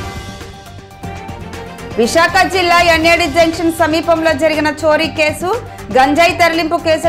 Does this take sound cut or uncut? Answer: cut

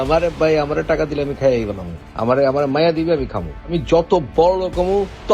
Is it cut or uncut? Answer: uncut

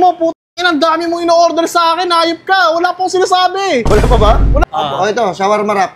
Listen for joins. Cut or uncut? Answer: cut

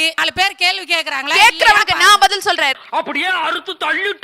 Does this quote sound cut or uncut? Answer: uncut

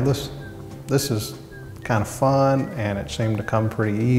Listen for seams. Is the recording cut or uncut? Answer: uncut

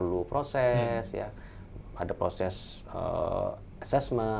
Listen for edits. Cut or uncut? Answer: uncut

